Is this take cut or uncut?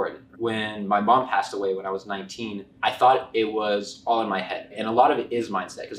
cut